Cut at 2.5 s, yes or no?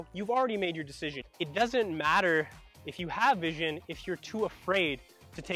no